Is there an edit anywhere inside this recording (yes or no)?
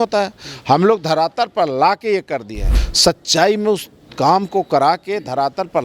yes